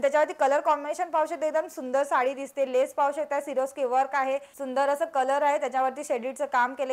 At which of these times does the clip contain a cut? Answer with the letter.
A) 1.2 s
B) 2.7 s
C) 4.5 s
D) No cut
C